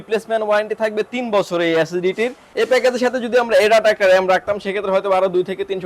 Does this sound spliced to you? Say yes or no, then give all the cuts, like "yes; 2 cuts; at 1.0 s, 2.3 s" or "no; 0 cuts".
yes; 1 cut; at 2.4 s